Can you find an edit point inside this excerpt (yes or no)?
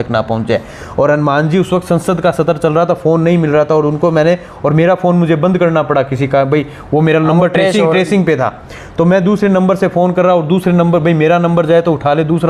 no